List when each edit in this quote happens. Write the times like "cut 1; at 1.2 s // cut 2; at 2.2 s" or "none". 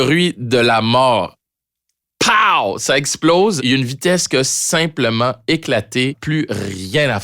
cut 1; at 3.6 s // cut 2; at 6.2 s